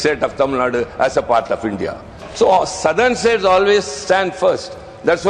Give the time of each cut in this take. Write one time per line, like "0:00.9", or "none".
0:02.2